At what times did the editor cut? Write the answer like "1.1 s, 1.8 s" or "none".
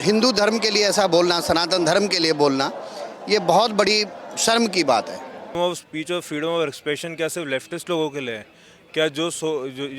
5.5 s